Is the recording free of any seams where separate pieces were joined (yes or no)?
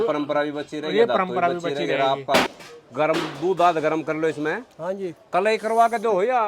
no